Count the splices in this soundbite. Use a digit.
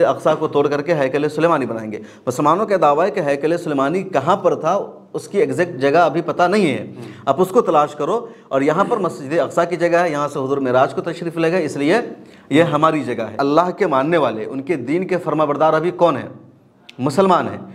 1